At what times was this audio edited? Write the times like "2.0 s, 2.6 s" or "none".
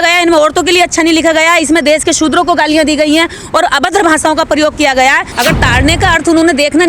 5.3 s